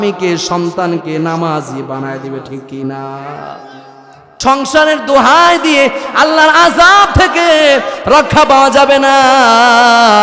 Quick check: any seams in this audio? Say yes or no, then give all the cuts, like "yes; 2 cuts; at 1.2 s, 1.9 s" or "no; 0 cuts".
yes; 1 cut; at 4.4 s